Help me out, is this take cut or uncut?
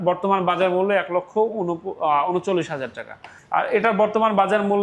cut